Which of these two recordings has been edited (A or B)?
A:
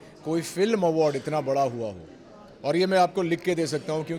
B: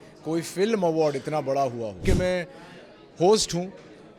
B